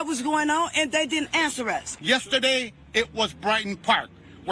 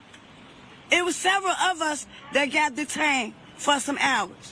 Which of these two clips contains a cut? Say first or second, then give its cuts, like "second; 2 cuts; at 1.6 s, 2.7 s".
first; 1 cut; at 1.9 s